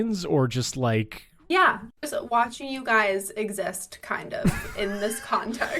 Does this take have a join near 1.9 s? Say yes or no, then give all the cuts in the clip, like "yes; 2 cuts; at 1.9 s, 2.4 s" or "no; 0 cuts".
yes; 1 cut; at 1.9 s